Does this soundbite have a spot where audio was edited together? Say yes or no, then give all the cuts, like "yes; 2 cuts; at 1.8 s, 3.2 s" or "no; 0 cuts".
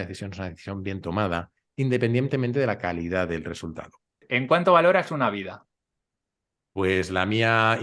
yes; 1 cut; at 4.3 s